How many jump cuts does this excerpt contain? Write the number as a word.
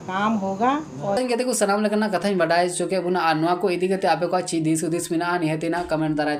zero